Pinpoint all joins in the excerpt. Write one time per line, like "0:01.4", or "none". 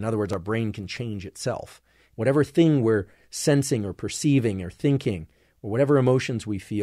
0:02.2